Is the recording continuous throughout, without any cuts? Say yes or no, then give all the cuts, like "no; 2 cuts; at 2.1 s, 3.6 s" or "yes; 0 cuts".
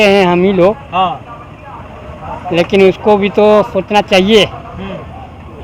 yes; 0 cuts